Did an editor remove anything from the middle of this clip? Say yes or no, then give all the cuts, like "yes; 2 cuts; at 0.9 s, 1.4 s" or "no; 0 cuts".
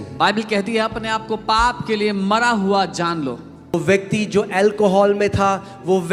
yes; 1 cut; at 3.7 s